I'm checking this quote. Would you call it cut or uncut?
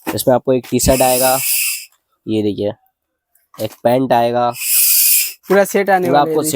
uncut